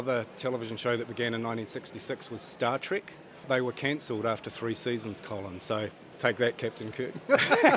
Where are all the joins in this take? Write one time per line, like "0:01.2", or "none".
0:03.4
0:06.0